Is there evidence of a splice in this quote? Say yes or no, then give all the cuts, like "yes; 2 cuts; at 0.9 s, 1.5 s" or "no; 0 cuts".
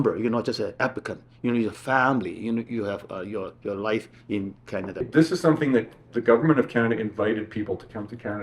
yes; 1 cut; at 5.0 s